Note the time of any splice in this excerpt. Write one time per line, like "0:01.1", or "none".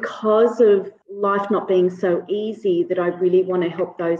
0:01.0